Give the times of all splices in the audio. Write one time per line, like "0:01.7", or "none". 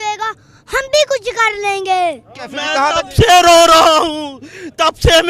0:02.4